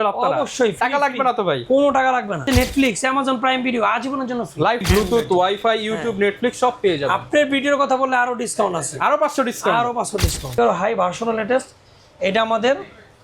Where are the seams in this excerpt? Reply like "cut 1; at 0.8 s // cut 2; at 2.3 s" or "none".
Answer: cut 1; at 2.4 s // cut 2; at 4.8 s // cut 3; at 10.6 s